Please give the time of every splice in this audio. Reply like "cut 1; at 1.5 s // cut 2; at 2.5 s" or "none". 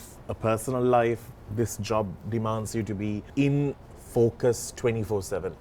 cut 1; at 3.2 s